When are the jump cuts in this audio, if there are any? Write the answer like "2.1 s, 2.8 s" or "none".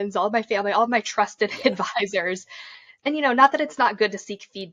2.8 s